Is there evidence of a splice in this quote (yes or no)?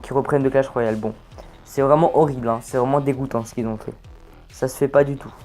yes